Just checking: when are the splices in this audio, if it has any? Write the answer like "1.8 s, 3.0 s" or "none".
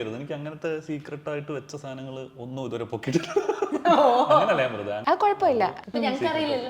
5.0 s, 5.8 s